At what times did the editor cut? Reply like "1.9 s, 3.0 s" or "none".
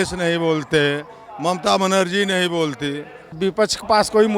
3.4 s